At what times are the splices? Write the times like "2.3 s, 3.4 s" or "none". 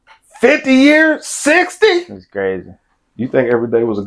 none